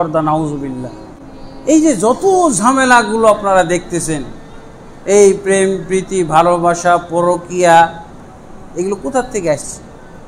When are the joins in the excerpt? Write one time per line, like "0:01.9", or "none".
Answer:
0:01.0